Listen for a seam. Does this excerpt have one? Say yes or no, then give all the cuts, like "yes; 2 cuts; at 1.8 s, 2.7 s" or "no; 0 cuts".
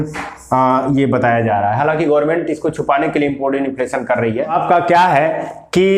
yes; 1 cut; at 4.5 s